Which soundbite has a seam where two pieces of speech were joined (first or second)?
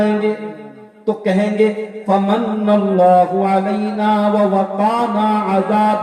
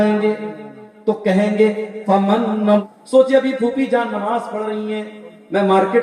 second